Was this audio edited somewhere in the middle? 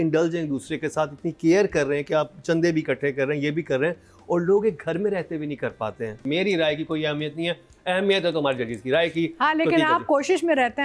yes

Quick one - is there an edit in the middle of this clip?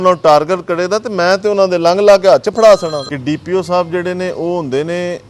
yes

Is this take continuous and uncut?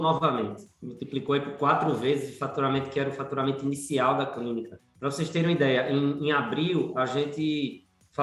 yes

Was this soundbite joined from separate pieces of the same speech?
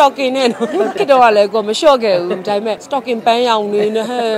yes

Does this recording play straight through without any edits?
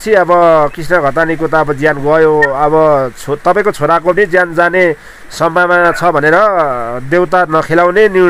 yes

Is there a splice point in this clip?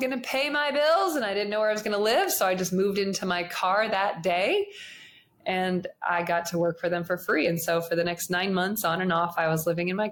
no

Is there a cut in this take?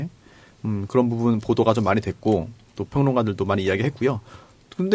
no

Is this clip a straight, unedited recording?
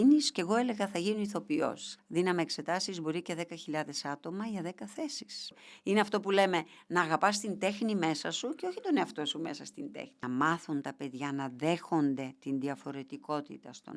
no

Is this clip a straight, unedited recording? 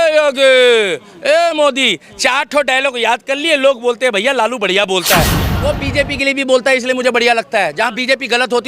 no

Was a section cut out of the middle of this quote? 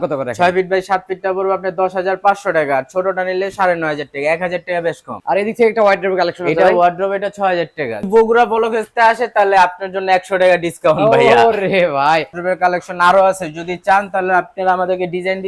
yes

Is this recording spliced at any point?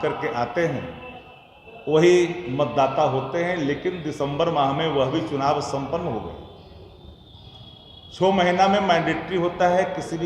no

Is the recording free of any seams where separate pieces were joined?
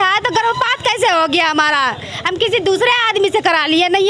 yes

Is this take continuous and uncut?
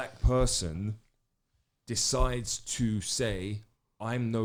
yes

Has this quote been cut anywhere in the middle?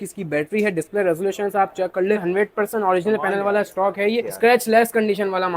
yes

